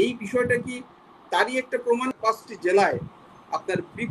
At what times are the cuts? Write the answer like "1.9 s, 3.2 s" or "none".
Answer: 2.1 s